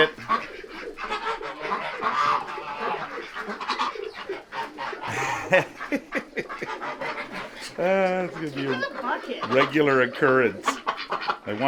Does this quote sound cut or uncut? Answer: uncut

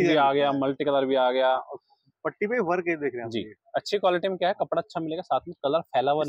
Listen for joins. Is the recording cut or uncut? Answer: uncut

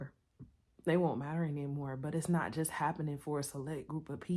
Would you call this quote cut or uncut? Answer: uncut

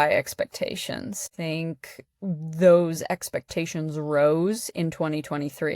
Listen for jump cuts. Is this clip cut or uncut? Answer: cut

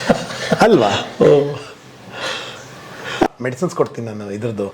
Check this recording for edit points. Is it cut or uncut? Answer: cut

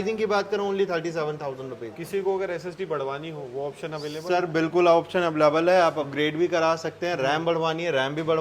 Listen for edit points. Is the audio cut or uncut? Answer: uncut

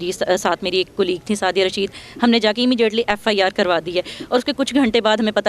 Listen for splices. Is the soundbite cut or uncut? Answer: uncut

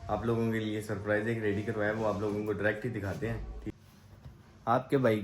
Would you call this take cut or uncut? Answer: cut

